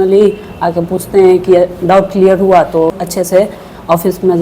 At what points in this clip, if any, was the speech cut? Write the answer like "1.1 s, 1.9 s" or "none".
2.9 s